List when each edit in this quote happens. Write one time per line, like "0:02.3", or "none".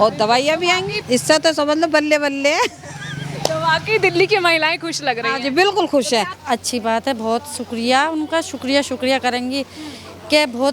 0:00.9
0:06.4